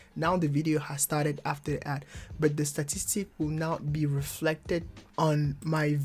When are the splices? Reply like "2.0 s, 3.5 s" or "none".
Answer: 5.0 s